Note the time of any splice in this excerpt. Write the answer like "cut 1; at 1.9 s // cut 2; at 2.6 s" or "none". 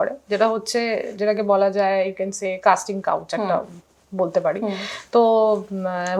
none